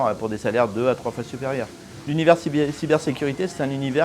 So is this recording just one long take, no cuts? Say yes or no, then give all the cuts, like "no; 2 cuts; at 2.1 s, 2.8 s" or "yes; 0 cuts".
yes; 0 cuts